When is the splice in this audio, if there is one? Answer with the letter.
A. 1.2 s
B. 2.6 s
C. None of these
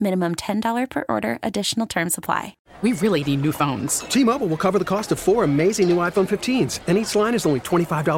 B